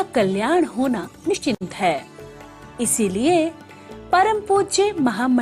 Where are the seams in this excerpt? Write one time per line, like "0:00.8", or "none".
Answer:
0:01.4

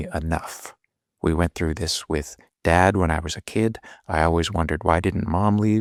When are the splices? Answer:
none

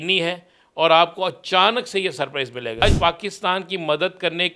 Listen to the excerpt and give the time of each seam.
0:02.8

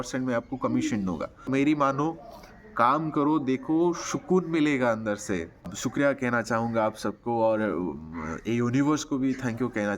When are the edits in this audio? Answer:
0:01.5
0:05.7

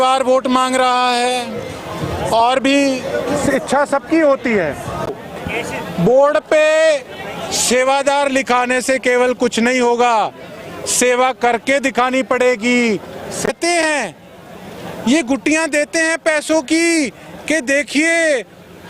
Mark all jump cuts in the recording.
0:05.2
0:13.5

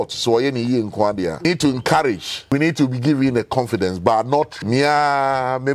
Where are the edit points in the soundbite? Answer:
0:01.4
0:02.5
0:04.5

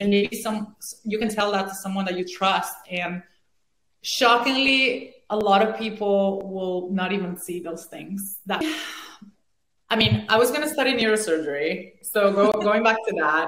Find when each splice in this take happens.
0:08.6

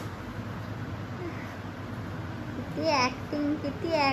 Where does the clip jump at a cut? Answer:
none

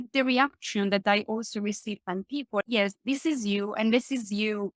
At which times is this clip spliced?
0:02.6

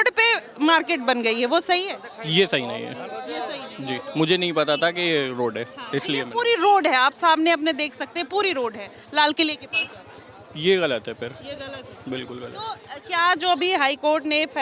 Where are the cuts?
none

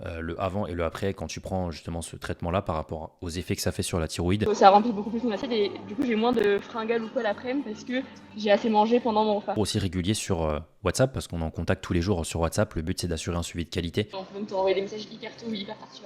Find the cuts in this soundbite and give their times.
0:04.5
0:09.5
0:14.2

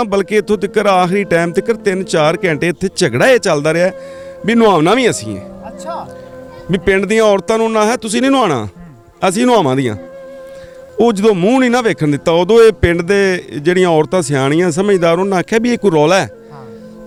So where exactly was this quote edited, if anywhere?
none

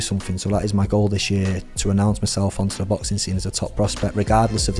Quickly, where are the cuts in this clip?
none

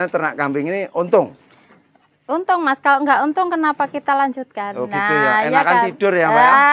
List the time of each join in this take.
none

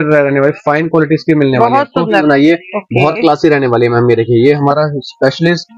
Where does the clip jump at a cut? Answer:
0:02.2

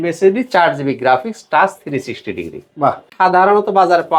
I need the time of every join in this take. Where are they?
0:03.1

